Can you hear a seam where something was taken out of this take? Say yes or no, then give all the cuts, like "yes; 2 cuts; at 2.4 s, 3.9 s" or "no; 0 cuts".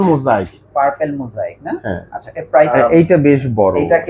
yes; 1 cut; at 2.7 s